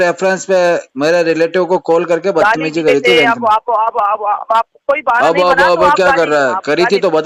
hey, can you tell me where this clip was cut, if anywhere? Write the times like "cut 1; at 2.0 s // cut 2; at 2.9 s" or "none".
none

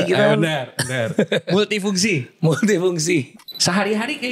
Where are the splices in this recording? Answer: cut 1; at 3.4 s

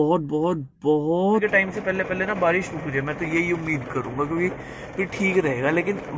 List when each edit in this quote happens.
cut 1; at 1.4 s

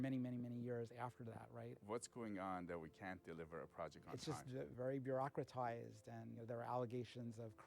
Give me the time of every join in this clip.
cut 1; at 1.7 s // cut 2; at 4.7 s // cut 3; at 6.4 s

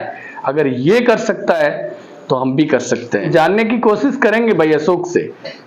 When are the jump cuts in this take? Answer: cut 1; at 3.2 s

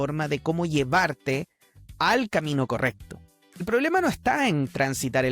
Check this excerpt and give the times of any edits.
cut 1; at 3.7 s

